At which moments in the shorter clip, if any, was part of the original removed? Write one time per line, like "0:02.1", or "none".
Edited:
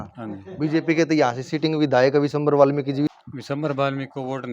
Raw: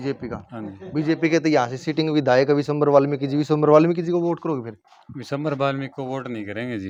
0:03.1